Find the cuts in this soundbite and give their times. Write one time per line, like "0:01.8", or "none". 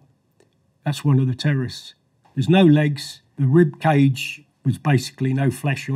0:02.2
0:03.3

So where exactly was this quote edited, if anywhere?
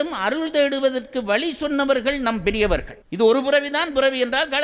0:03.0

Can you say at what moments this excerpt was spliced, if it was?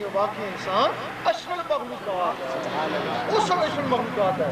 none

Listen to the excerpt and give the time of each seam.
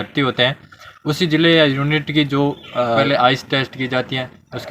0:03.0

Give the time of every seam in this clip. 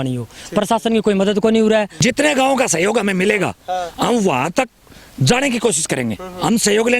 0:01.9

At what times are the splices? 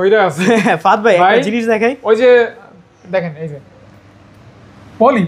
none

